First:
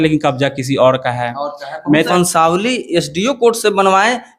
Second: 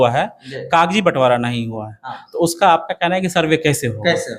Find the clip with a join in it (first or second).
first